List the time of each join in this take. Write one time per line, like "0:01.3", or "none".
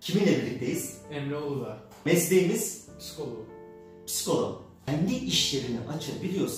0:02.0
0:04.7